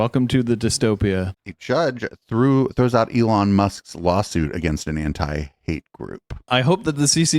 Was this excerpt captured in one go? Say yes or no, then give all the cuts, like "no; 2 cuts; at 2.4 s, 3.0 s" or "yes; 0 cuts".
no; 2 cuts; at 1.3 s, 6.5 s